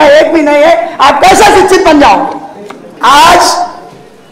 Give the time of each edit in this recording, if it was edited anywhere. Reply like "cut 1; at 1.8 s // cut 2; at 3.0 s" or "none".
cut 1; at 2.9 s

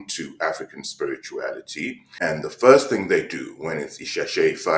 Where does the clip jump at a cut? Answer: cut 1; at 2.0 s

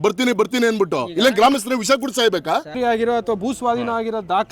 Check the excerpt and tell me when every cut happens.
cut 1; at 2.8 s

